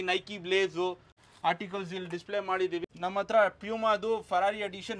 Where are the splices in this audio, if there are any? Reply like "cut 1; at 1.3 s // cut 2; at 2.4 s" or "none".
cut 1; at 1.2 s // cut 2; at 2.8 s